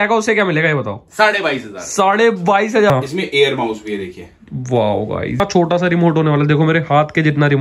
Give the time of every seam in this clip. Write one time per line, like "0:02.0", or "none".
0:02.9
0:05.4